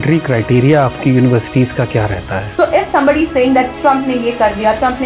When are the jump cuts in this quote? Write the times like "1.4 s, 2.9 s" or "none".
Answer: 2.4 s